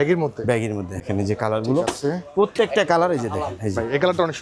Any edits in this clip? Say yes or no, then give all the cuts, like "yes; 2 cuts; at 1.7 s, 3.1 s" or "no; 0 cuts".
yes; 1 cut; at 1.0 s